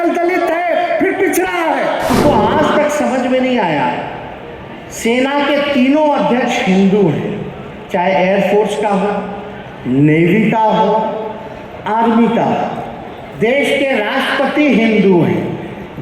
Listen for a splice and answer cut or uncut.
cut